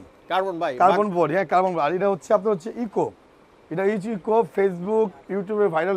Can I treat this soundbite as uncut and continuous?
yes; 0 cuts

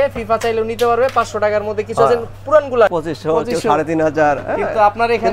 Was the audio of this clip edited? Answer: yes; 1 cut; at 2.9 s

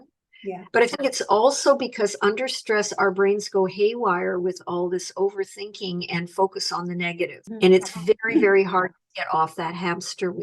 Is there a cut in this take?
yes; 1 cut; at 7.4 s

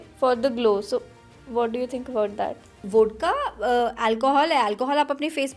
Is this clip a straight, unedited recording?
no; 1 cut; at 2.8 s

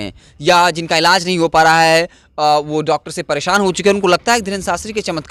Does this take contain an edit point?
no; 0 cuts

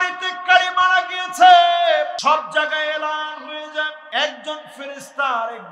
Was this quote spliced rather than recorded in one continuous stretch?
yes; 2 cuts; at 2.2 s, 4.0 s

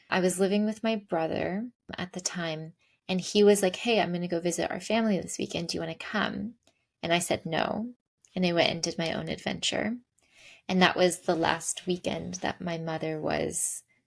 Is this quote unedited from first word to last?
yes; 0 cuts

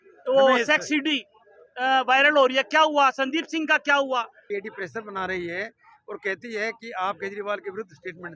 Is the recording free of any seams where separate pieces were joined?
no; 1 cut; at 4.4 s

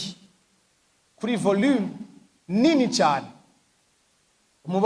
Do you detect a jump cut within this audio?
no; 0 cuts

